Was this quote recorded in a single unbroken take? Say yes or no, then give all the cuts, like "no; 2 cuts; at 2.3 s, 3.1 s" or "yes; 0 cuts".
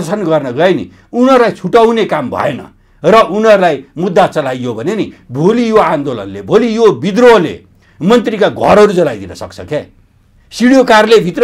yes; 0 cuts